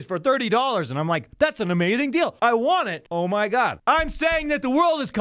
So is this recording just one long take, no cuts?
no; 3 cuts; at 2.3 s, 3.0 s, 3.8 s

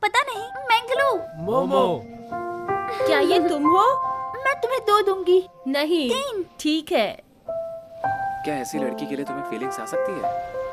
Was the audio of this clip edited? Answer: no; 0 cuts

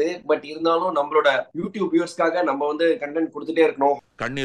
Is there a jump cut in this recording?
no; 0 cuts

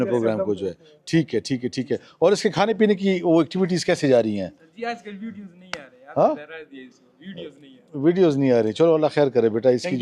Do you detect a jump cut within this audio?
no; 0 cuts

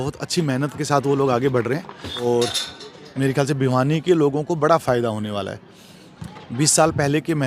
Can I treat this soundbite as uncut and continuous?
no; 1 cut; at 2.2 s

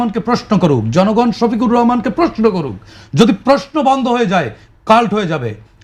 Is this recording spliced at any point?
no; 0 cuts

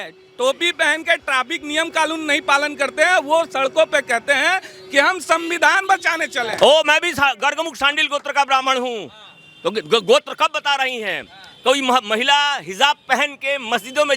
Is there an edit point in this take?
yes; 1 cut; at 6.5 s

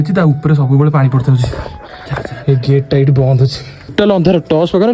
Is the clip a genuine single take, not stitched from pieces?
no; 1 cut; at 3.9 s

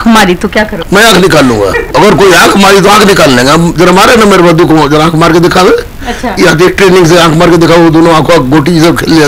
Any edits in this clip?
no; 0 cuts

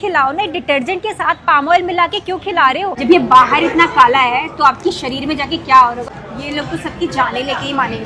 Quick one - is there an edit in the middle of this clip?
yes; 2 cuts; at 2.9 s, 6.1 s

